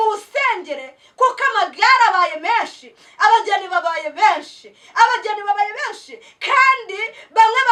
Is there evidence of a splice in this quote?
no; 0 cuts

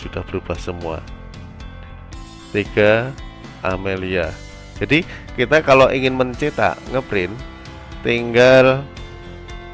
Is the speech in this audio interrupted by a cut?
no; 0 cuts

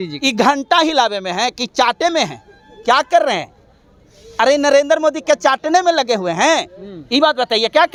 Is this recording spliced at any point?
no; 0 cuts

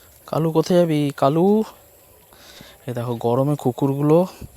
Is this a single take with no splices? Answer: yes; 0 cuts

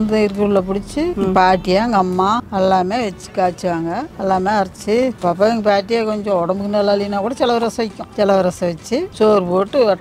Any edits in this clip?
yes; 6 cuts; at 1.1 s, 2.5 s, 4.1 s, 5.2 s, 8.1 s, 9.1 s

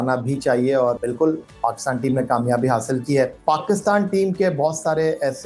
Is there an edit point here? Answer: yes; 2 cuts; at 1.0 s, 3.4 s

